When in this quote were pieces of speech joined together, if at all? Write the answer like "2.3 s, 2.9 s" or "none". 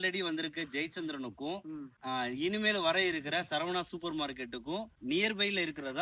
none